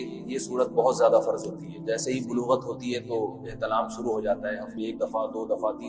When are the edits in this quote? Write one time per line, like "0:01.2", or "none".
0:04.7